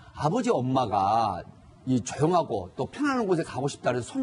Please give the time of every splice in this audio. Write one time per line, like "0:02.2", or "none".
0:03.3